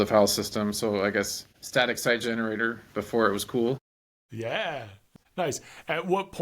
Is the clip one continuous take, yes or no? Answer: no